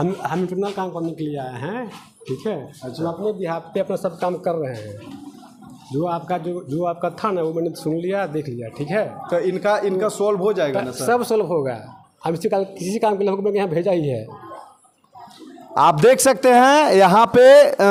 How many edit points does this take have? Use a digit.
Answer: 0